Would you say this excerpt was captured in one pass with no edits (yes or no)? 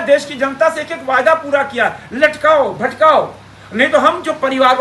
yes